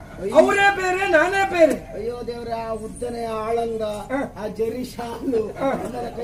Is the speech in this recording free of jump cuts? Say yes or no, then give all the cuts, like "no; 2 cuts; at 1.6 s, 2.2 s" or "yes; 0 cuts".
yes; 0 cuts